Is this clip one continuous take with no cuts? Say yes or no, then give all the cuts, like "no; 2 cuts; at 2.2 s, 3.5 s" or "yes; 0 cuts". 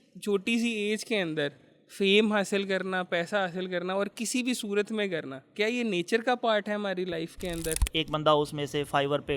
no; 1 cut; at 7.8 s